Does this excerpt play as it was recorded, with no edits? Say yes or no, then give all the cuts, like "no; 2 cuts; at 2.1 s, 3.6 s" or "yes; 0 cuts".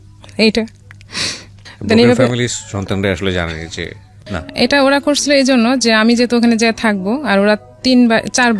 no; 1 cut; at 4.4 s